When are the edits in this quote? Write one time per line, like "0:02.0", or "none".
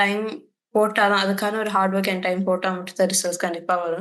none